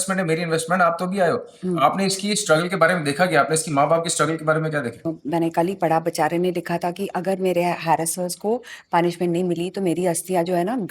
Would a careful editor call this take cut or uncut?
cut